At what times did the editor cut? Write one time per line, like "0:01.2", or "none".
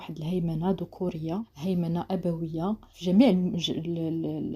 0:01.5
0:02.9